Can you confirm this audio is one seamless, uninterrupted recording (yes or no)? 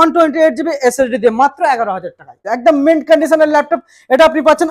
no